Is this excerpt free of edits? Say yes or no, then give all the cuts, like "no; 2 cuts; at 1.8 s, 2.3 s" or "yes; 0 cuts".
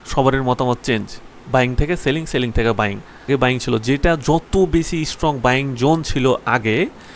no; 1 cut; at 3.2 s